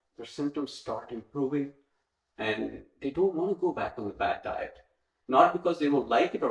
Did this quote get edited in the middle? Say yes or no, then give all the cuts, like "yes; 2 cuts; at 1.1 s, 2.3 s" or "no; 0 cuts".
no; 0 cuts